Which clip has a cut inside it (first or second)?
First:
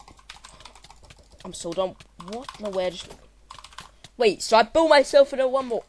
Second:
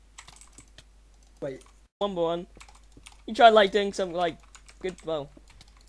second